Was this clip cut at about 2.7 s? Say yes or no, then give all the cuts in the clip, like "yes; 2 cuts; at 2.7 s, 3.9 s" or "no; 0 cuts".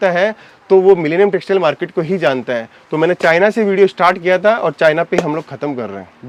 no; 0 cuts